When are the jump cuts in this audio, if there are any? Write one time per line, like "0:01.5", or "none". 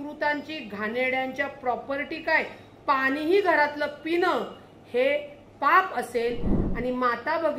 0:06.6